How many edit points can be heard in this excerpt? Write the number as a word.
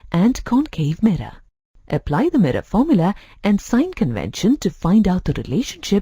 one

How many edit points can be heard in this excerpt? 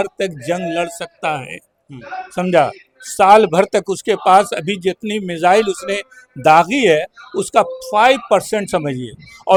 zero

